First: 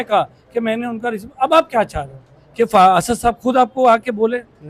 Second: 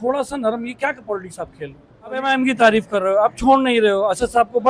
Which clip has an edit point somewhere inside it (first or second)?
second